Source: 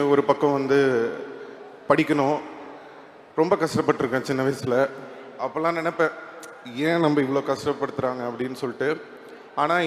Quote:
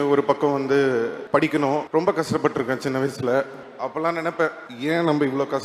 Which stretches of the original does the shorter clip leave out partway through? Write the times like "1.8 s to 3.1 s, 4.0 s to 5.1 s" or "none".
1.2 s to 1.7 s, 2.4 s to 3.3 s, 5.1 s to 5.2 s, 6.3 s to 6.6 s